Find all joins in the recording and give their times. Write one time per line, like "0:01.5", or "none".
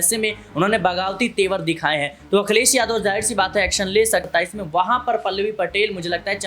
0:04.3